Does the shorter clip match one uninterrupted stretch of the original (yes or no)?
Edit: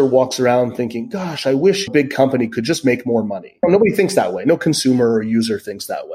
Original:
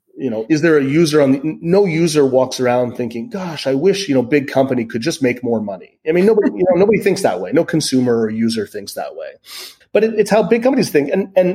no